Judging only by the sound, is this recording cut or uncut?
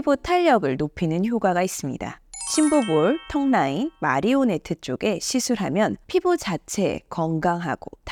uncut